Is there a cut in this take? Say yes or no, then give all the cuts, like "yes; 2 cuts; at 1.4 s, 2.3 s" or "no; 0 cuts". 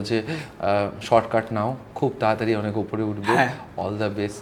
no; 0 cuts